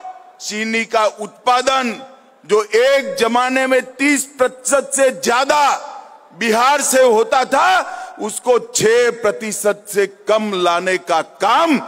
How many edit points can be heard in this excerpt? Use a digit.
0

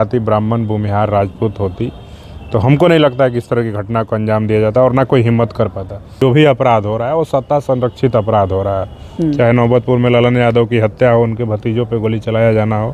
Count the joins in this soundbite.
1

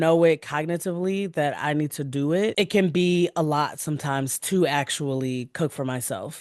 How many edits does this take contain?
1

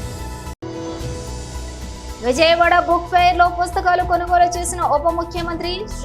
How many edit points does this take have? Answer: 1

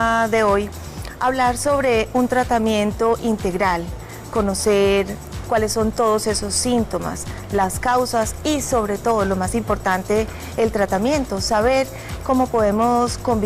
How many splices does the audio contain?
1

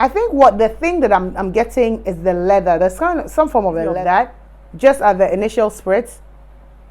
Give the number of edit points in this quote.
1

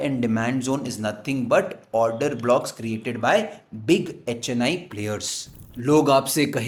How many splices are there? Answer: 0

